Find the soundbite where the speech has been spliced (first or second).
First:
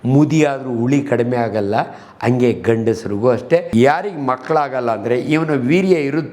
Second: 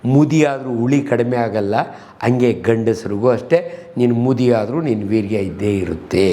first